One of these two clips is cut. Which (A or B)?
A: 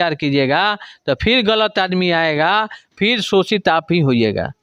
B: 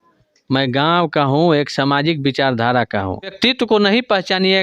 B